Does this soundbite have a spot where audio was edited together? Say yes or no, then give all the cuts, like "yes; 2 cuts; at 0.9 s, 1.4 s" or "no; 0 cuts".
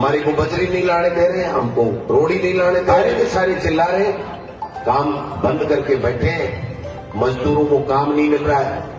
yes; 1 cut; at 2.9 s